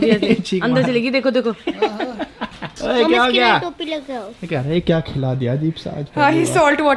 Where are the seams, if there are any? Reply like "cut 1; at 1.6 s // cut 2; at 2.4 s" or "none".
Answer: none